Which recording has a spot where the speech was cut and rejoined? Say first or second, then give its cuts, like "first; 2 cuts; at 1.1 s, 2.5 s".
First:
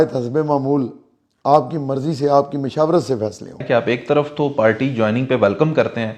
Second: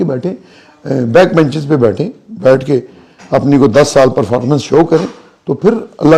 first; 1 cut; at 3.6 s